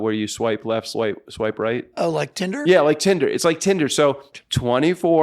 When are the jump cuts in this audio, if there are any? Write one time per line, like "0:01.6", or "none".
0:04.3